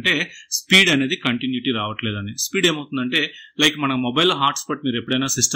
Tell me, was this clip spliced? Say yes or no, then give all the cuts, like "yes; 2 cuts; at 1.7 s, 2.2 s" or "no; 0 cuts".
no; 0 cuts